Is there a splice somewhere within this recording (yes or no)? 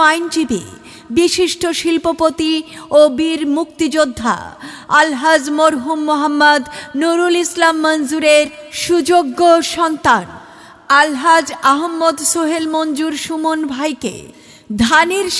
no